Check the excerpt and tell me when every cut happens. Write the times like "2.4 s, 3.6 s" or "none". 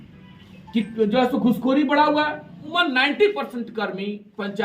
2.7 s